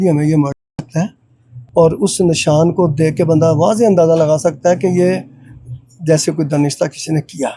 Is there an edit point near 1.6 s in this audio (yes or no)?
yes